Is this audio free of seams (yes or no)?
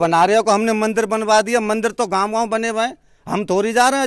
yes